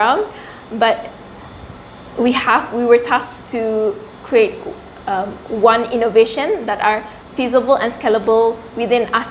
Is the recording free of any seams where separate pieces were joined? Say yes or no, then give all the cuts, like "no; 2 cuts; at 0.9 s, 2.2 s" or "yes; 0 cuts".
yes; 0 cuts